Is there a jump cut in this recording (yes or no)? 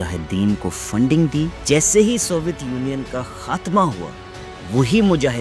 yes